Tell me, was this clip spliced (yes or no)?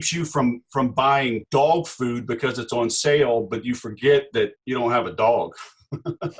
yes